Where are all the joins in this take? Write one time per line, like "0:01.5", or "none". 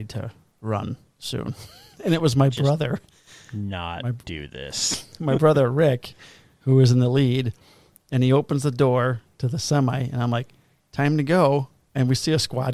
none